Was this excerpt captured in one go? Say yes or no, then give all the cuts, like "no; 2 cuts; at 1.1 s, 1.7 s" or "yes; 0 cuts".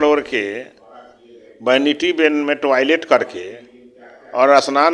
yes; 0 cuts